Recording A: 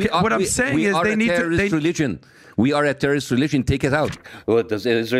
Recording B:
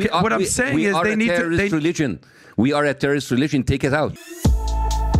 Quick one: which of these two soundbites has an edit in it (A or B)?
A